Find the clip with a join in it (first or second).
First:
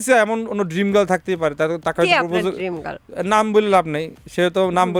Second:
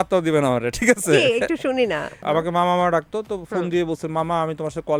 second